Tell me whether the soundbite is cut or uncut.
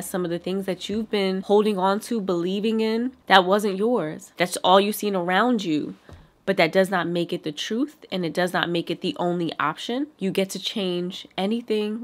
cut